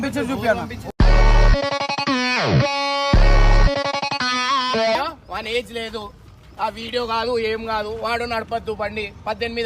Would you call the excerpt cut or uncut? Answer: cut